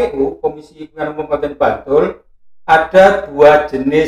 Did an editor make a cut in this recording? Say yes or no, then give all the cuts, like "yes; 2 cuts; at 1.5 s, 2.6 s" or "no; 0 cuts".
no; 0 cuts